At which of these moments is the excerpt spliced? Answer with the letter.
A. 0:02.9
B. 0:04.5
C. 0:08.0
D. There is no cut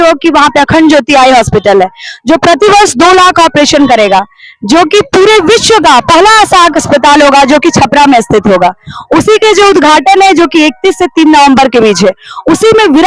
D